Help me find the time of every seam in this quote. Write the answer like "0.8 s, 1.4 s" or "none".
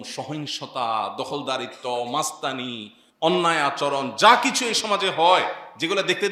none

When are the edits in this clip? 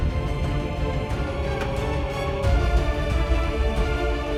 none

